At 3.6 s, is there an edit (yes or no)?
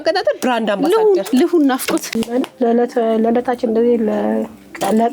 no